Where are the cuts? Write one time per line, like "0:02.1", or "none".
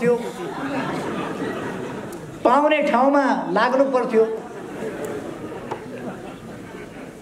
none